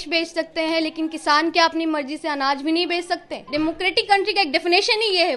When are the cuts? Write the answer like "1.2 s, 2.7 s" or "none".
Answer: 3.4 s